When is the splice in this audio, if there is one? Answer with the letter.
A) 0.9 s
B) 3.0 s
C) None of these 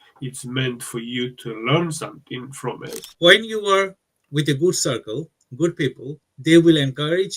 B